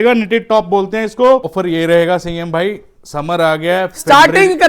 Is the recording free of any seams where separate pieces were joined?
no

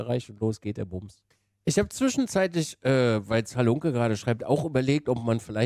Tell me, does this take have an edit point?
yes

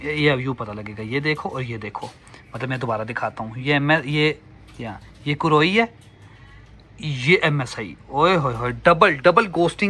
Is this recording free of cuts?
yes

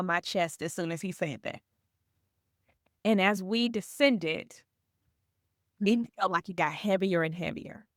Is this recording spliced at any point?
no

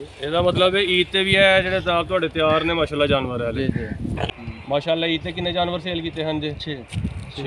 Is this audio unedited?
no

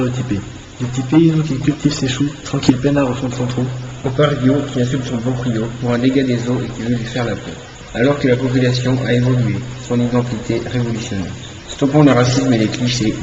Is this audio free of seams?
yes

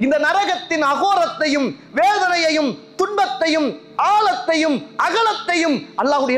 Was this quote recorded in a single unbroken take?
yes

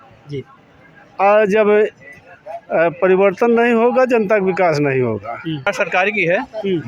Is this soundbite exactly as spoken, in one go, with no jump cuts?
no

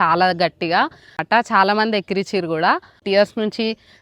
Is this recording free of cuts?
no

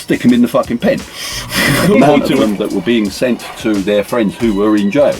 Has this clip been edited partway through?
yes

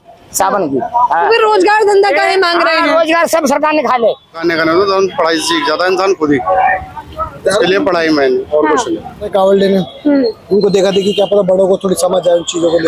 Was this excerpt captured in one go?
no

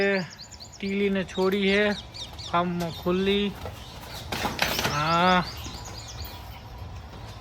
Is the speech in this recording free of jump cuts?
yes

